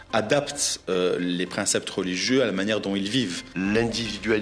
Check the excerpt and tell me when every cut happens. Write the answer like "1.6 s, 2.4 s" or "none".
3.4 s

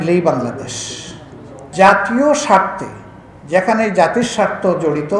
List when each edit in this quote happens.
1.6 s

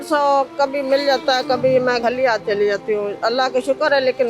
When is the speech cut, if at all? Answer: 2.0 s

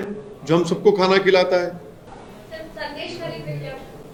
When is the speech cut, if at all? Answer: none

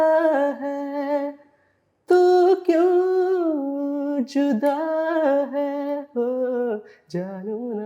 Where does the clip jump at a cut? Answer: none

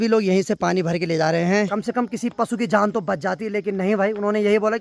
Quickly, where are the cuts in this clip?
1.7 s

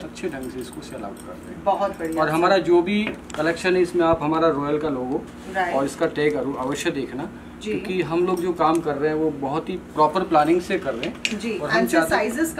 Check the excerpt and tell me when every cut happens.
none

